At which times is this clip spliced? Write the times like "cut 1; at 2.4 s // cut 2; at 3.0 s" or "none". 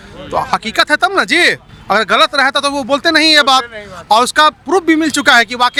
none

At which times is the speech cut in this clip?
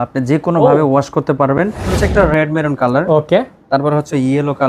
cut 1; at 2.0 s

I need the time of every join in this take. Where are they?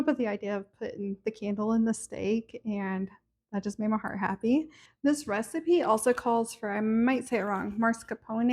cut 1; at 4.8 s

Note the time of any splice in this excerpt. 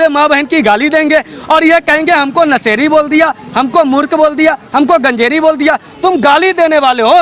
none

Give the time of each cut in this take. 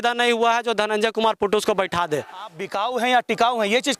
cut 1; at 2.7 s

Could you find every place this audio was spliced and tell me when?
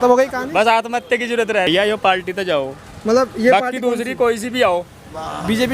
cut 1; at 1.7 s

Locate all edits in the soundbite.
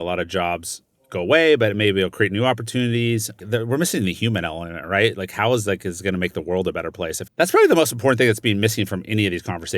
cut 1; at 3.4 s // cut 2; at 7.2 s

